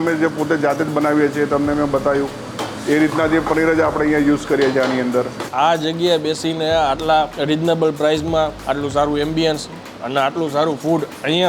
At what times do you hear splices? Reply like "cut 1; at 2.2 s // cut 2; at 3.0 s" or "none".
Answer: cut 1; at 5.4 s // cut 2; at 7.3 s // cut 3; at 8.6 s